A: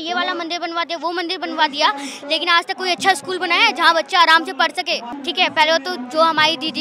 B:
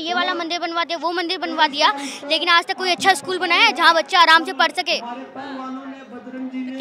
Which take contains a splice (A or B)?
A